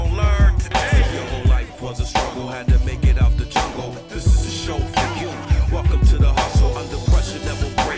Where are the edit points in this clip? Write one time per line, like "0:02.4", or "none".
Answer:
none